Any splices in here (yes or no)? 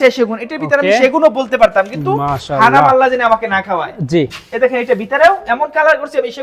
no